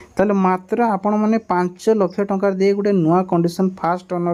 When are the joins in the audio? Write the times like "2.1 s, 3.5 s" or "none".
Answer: none